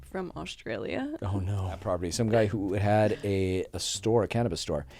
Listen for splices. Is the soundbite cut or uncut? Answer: cut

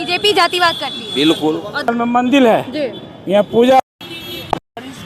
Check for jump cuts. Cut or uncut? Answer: cut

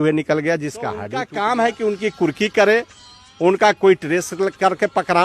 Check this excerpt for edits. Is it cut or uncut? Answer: cut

